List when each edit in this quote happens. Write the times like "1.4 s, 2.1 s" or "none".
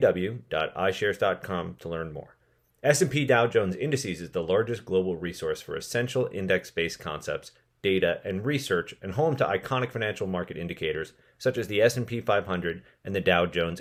none